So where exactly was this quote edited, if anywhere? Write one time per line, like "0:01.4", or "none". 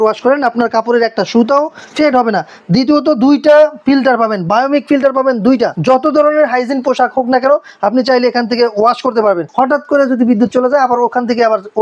0:05.8
0:09.5